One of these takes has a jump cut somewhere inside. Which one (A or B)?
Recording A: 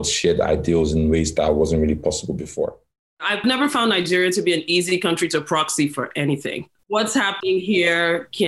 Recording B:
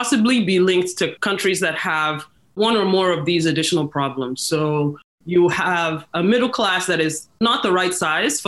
A